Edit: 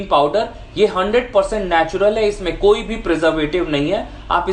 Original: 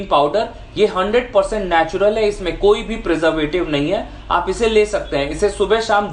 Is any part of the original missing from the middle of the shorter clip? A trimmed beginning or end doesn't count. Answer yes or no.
no